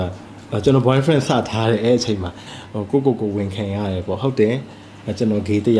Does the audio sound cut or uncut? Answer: cut